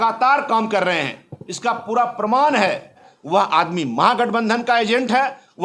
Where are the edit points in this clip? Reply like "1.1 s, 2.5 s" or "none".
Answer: 3.1 s